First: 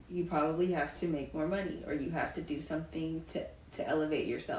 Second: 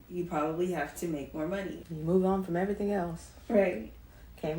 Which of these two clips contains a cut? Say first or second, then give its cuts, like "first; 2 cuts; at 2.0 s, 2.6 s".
second; 1 cut; at 1.8 s